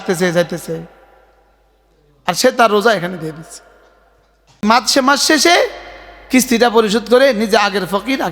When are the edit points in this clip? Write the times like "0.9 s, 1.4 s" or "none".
4.6 s